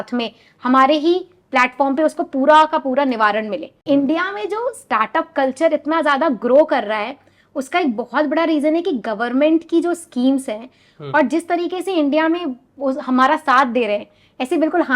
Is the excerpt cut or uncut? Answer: cut